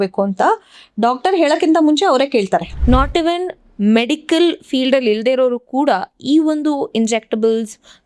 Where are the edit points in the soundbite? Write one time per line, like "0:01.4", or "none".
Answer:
0:02.7